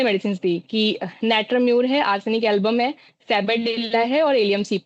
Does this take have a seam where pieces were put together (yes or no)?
no